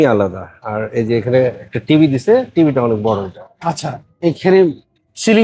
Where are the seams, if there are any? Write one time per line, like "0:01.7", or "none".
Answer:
none